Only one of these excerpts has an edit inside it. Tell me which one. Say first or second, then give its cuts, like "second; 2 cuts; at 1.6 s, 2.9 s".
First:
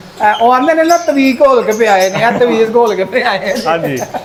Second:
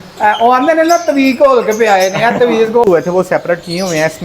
second; 1 cut; at 2.8 s